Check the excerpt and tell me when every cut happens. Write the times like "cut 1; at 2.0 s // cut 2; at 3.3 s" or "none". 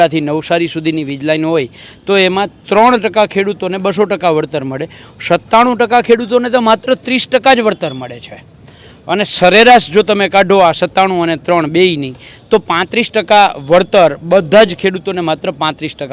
none